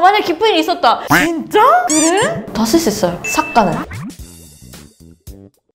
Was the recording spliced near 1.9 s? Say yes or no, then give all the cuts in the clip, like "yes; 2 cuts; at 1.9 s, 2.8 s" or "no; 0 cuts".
yes; 1 cut; at 1.9 s